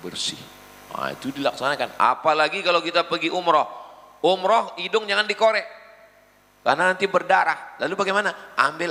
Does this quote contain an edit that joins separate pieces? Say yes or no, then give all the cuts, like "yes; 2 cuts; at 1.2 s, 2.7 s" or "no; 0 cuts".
no; 0 cuts